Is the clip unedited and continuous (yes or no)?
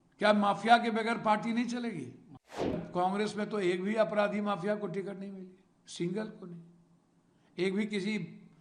no